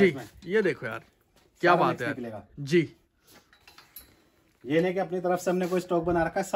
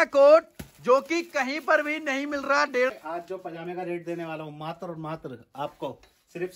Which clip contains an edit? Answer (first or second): second